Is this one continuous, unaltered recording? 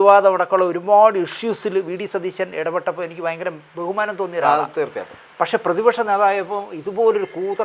yes; 0 cuts

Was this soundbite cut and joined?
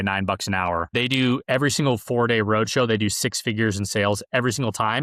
yes; 1 cut; at 0.9 s

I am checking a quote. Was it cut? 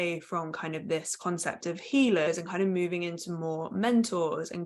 yes; 1 cut; at 2.3 s

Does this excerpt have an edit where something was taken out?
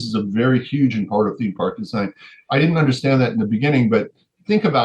no; 0 cuts

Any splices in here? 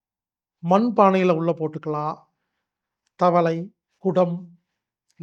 no; 0 cuts

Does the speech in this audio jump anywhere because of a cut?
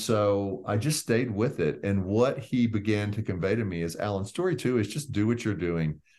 no; 0 cuts

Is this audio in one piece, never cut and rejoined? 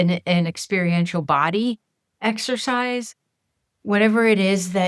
yes; 0 cuts

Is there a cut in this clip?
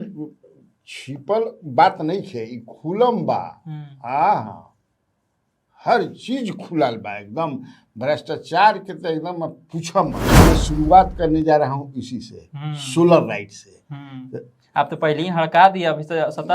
yes; 1 cut; at 10.3 s

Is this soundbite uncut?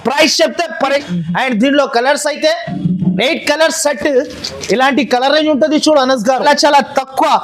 no; 2 cuts; at 1.0 s, 6.4 s

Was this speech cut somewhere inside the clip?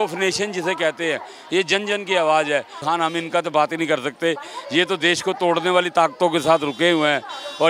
yes; 1 cut; at 2.8 s

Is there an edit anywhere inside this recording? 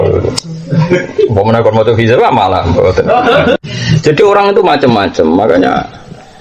yes; 1 cut; at 3.6 s

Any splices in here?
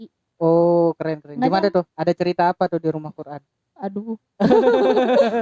no; 0 cuts

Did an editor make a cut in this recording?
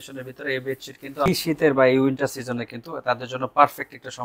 yes; 1 cut; at 1.3 s

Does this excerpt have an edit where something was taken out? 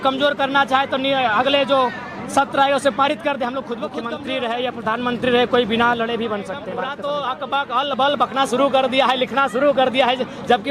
yes; 2 cuts; at 4.1 s, 6.6 s

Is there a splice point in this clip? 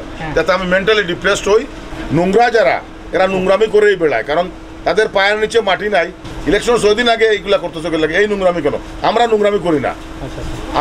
yes; 2 cuts; at 1.8 s, 6.2 s

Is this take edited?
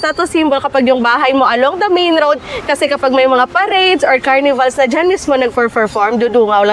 no; 0 cuts

